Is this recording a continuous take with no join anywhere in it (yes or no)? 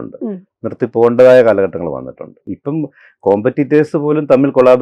no